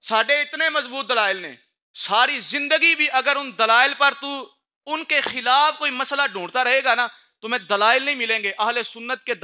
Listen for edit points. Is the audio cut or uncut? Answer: uncut